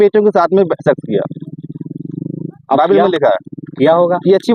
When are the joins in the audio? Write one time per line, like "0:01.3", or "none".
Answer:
none